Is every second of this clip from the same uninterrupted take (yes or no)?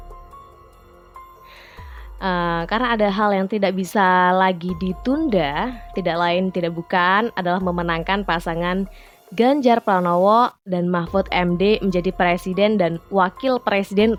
yes